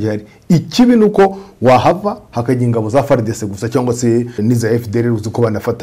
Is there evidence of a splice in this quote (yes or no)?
yes